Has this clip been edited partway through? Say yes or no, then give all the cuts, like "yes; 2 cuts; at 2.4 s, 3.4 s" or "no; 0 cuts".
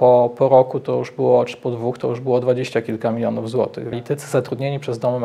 yes; 1 cut; at 3.9 s